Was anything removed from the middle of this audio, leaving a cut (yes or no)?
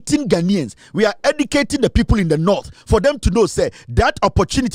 no